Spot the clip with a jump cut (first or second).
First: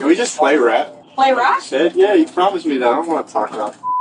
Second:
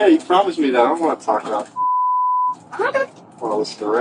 first